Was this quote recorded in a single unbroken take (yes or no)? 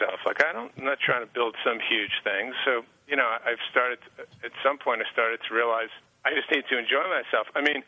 no